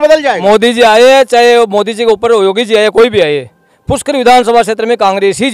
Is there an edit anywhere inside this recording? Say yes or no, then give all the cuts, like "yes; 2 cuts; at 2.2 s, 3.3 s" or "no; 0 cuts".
no; 0 cuts